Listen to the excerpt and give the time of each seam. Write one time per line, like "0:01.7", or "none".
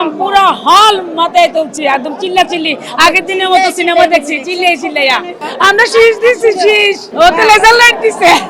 none